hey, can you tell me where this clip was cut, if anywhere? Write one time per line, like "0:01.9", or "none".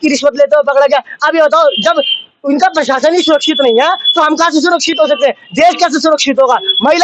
none